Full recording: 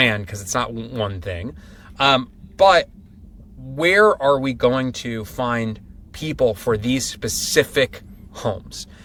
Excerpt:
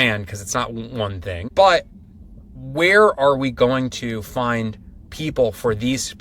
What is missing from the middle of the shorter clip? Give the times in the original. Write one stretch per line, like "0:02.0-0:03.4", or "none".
0:01.4-0:02.5